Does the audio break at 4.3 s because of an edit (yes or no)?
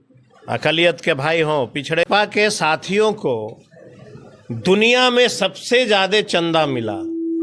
no